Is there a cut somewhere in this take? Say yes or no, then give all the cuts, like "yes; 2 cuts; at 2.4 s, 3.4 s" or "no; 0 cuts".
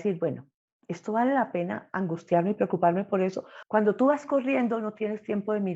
yes; 1 cut; at 3.5 s